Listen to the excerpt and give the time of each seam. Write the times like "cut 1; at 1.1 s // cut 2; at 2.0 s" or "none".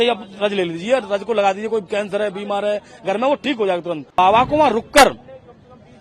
cut 1; at 4.2 s